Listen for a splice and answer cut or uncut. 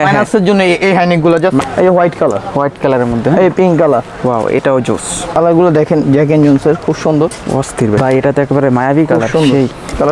cut